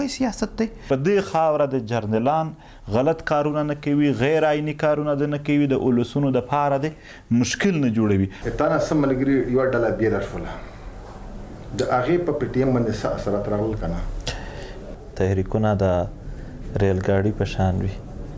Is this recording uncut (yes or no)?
no